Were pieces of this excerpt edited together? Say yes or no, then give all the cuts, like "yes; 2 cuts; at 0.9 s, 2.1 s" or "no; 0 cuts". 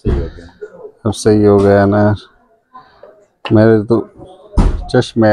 no; 0 cuts